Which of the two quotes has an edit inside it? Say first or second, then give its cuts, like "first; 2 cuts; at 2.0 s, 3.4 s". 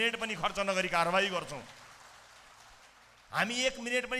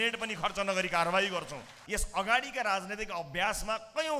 second; 1 cut; at 1.8 s